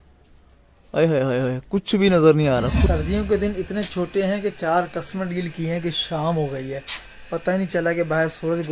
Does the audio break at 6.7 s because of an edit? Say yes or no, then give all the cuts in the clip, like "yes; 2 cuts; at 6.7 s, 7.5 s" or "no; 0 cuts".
no; 1 cut; at 3.2 s